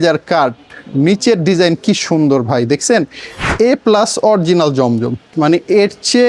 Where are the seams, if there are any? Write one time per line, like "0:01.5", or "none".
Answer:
0:03.5
0:05.2